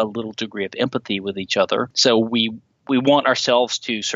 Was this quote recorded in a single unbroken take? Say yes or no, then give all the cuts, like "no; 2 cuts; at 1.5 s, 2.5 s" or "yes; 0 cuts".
no; 1 cut; at 1.9 s